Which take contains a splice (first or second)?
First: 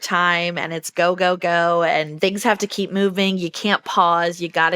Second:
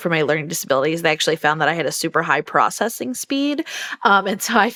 first